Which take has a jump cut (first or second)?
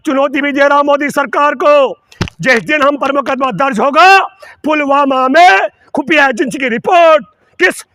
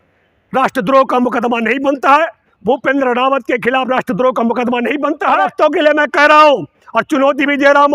second